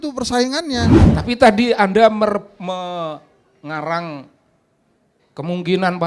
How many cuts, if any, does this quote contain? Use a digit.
1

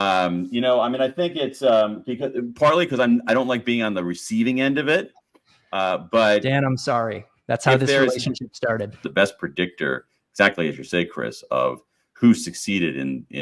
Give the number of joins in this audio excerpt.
1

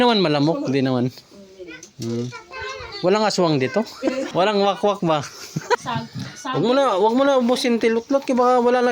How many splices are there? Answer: 2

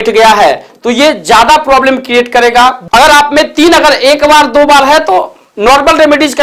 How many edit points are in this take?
1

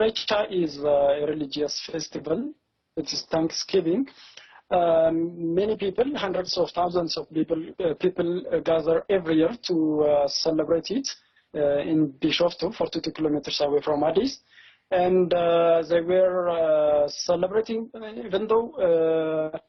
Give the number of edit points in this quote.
1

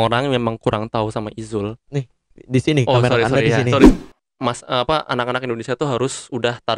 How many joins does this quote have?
1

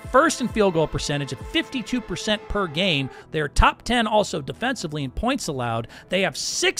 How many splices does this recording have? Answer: 1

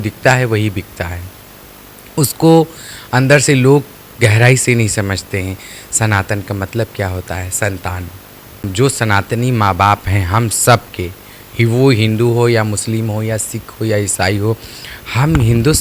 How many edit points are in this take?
1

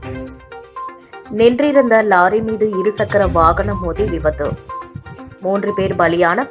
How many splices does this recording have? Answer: 1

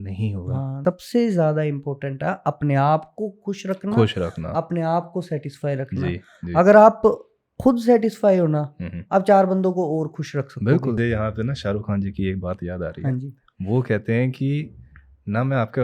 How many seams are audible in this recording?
2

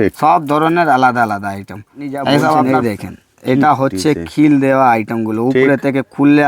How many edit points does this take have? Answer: 1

